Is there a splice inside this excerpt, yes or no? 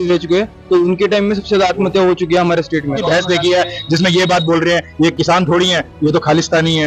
yes